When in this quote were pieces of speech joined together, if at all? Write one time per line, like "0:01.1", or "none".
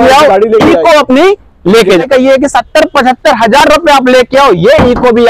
0:02.0